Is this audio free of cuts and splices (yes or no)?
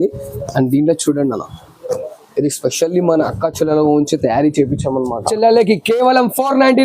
no